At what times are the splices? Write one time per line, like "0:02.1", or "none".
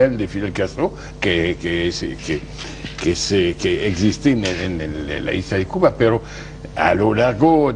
0:05.0